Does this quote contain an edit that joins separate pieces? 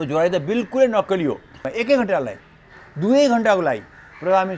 yes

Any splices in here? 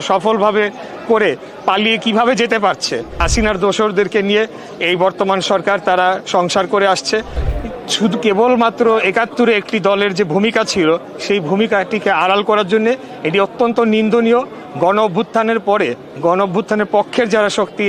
yes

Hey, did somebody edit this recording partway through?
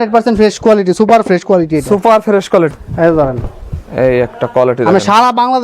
yes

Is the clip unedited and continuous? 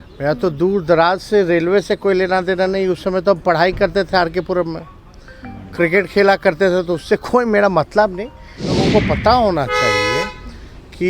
no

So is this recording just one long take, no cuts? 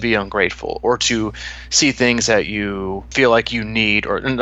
no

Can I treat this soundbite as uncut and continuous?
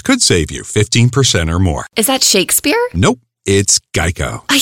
no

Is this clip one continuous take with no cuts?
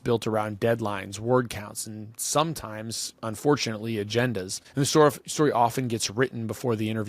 no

